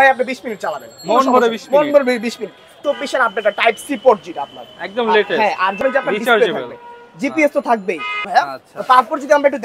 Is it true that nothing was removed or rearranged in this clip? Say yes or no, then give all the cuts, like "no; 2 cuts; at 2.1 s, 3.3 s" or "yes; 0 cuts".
no; 3 cuts; at 2.7 s, 5.8 s, 8.3 s